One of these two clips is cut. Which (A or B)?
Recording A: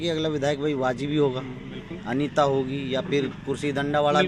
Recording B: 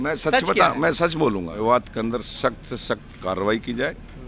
B